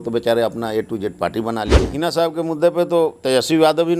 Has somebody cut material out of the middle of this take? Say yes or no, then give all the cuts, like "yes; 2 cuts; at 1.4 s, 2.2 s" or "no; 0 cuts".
yes; 1 cut; at 1.9 s